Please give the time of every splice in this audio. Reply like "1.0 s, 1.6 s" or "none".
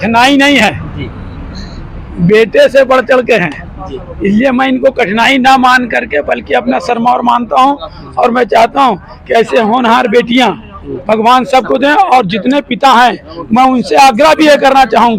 none

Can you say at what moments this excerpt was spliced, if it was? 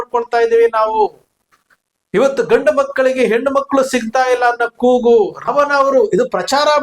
5.5 s

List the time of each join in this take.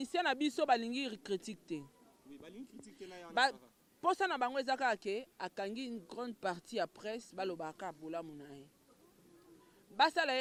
none

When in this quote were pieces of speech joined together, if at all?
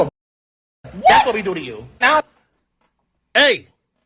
none

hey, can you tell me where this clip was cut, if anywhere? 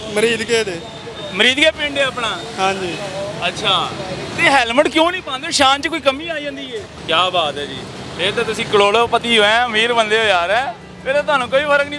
6.9 s

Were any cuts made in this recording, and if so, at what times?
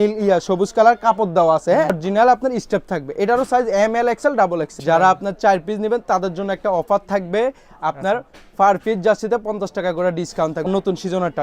2.0 s, 4.7 s, 10.7 s

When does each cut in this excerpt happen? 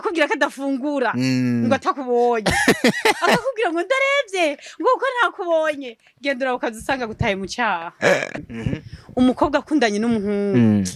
8.4 s

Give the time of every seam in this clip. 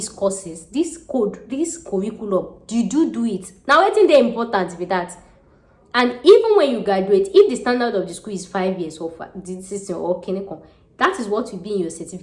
none

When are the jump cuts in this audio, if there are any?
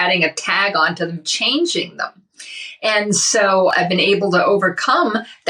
3.7 s

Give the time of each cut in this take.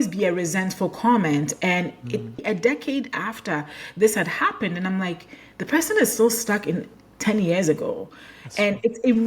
2.4 s

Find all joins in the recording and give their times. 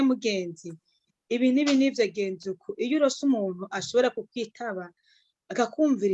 none

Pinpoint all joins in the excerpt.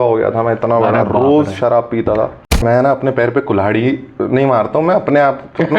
2.6 s

